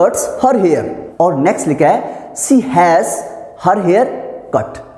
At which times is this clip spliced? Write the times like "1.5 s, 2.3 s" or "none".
1.0 s